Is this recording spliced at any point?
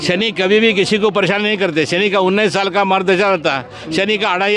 no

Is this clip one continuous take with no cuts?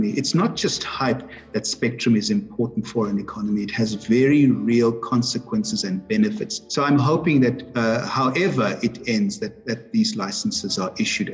yes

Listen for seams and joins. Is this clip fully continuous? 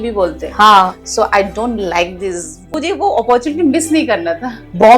no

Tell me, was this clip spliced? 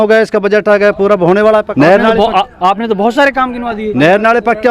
yes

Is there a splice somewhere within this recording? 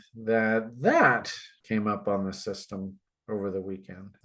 no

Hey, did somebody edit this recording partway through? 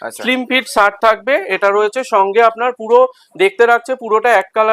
no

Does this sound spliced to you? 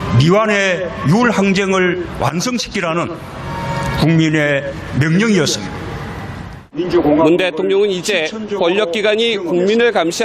yes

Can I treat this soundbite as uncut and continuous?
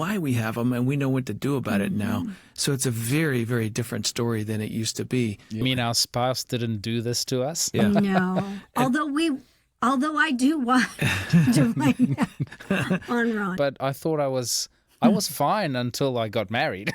no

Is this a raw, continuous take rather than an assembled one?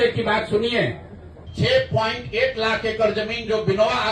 no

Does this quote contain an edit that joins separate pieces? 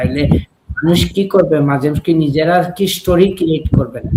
no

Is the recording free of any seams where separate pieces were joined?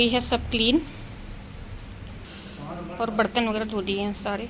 yes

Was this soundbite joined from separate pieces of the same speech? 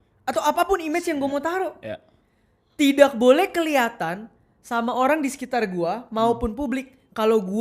no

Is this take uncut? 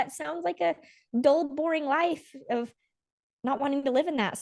yes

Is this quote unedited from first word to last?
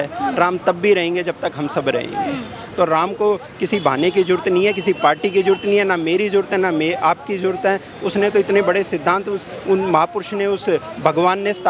yes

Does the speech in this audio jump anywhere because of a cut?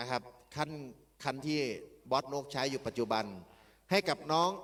no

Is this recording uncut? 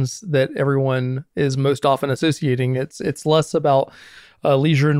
yes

